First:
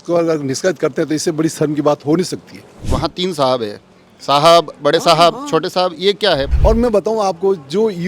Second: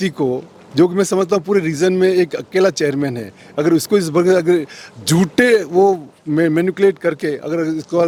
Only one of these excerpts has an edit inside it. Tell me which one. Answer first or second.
first